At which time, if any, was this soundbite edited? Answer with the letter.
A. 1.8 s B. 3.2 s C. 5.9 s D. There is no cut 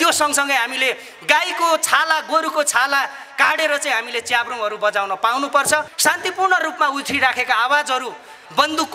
C